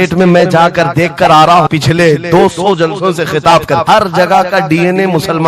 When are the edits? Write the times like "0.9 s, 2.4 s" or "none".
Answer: 1.7 s, 3.9 s